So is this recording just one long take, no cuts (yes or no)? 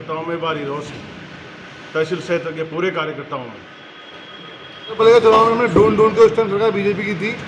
no